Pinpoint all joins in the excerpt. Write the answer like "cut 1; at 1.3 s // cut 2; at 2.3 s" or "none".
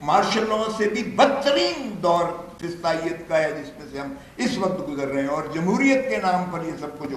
none